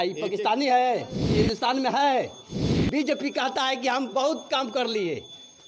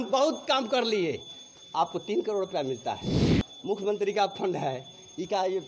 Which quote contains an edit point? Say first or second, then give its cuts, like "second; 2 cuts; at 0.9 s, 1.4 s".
first; 1 cut; at 1.2 s